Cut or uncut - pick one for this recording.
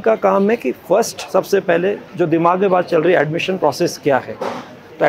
uncut